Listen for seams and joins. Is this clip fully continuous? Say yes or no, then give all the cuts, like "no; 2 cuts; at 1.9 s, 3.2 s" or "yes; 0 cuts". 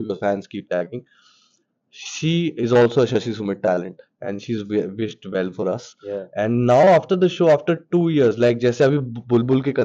yes; 0 cuts